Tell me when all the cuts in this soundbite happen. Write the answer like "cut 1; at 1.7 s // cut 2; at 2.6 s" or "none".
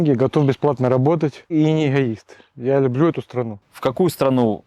cut 1; at 1.5 s // cut 2; at 3.6 s